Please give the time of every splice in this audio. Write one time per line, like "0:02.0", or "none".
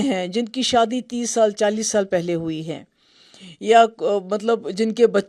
none